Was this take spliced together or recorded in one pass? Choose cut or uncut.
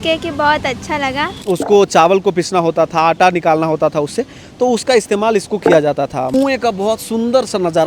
cut